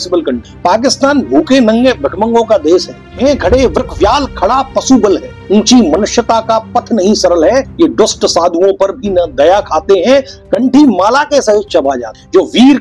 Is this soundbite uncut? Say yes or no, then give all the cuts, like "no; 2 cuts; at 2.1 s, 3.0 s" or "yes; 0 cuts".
no; 1 cut; at 3.0 s